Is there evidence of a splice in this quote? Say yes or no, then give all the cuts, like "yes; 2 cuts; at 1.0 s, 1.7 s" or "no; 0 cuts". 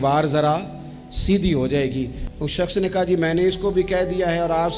yes; 1 cut; at 2.2 s